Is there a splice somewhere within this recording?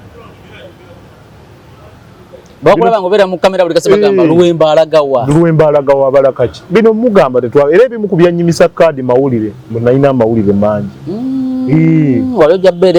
no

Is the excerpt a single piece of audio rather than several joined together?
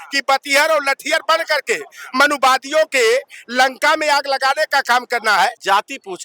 no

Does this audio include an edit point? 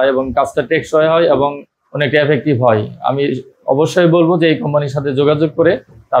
no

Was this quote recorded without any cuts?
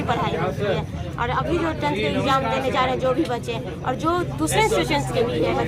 yes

